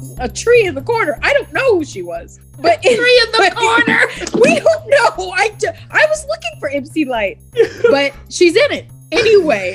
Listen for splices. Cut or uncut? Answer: uncut